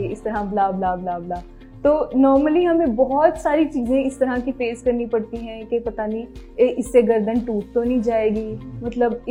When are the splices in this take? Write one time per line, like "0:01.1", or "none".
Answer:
none